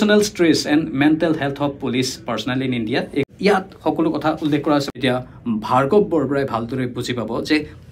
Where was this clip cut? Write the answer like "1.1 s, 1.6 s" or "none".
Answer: 3.3 s, 4.9 s